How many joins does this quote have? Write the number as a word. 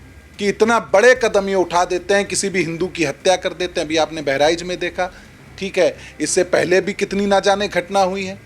zero